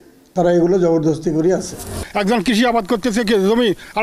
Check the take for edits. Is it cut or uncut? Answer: cut